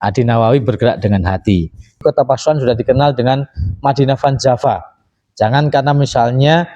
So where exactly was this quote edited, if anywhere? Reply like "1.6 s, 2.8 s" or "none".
2.0 s